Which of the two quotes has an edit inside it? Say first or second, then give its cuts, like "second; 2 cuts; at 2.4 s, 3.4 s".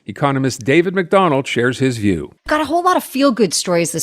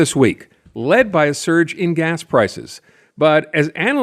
first; 1 cut; at 2.3 s